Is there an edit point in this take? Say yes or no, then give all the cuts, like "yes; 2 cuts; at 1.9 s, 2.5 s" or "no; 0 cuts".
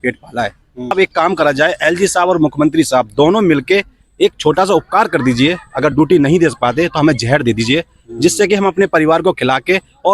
yes; 1 cut; at 0.9 s